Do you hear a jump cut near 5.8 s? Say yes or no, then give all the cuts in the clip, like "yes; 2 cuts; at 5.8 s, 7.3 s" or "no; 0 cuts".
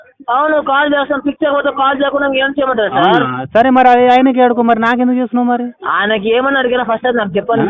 yes; 1 cut; at 5.8 s